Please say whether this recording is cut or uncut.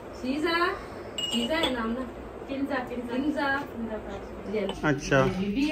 cut